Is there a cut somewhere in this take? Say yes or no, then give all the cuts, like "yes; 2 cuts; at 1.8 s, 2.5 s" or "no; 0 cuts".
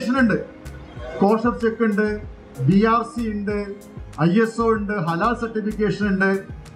no; 0 cuts